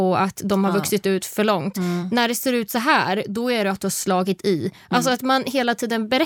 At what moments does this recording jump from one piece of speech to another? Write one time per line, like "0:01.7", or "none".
none